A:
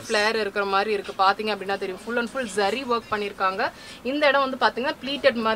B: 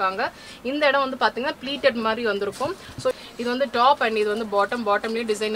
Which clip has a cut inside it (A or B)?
B